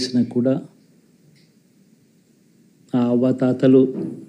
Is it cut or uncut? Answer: uncut